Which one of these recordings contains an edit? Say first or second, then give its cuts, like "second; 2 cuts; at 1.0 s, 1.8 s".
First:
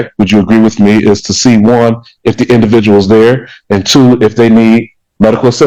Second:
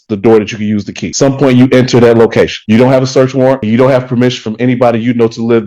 second; 3 cuts; at 1.0 s, 2.6 s, 3.6 s